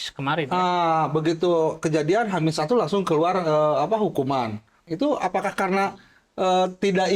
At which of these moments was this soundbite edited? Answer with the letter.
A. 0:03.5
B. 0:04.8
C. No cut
B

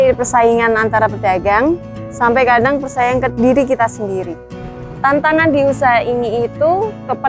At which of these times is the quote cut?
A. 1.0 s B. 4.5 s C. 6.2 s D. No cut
B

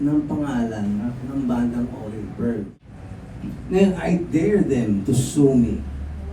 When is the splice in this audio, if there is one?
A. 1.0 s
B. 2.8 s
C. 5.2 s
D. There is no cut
B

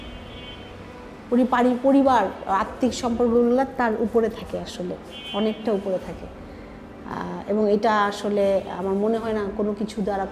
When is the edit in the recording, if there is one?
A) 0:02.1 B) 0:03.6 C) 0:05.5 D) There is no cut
D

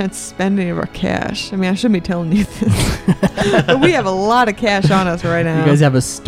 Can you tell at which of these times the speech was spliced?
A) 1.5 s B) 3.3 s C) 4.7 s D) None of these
D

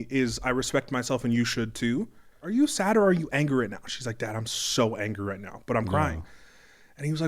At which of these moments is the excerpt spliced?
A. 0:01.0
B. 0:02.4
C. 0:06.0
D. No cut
B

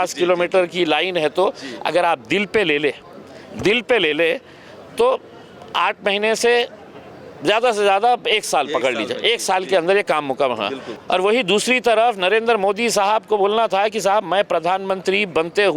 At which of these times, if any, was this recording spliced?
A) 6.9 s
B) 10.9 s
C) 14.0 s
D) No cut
B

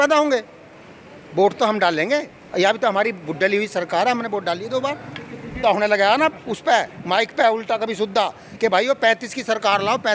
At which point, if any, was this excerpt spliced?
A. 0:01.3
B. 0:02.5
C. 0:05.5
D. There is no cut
C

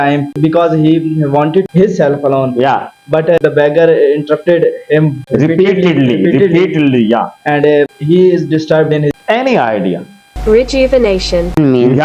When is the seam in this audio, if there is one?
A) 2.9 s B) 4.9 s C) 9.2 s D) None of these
C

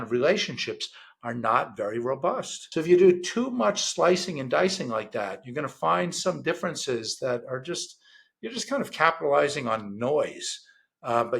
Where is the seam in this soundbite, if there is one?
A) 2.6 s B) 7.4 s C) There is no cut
A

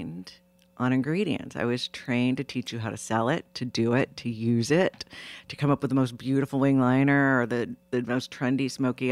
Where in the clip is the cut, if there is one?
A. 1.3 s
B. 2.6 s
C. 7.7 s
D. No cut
D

